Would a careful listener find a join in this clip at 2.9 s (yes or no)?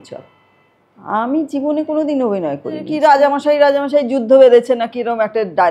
yes